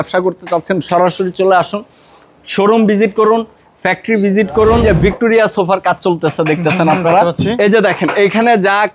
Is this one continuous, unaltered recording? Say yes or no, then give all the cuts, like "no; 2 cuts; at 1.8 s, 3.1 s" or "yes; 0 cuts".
no; 2 cuts; at 4.8 s, 7.5 s